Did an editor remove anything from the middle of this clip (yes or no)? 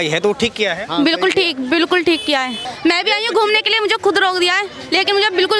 yes